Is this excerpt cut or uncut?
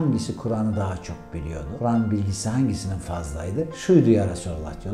cut